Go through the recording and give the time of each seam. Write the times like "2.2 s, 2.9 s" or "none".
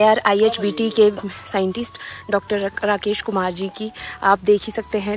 none